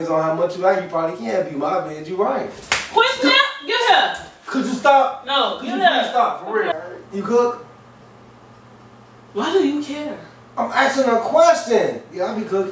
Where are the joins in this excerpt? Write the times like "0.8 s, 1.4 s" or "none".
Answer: 6.7 s